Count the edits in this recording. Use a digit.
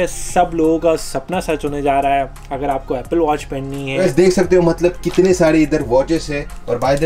1